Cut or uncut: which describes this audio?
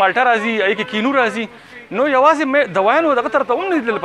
uncut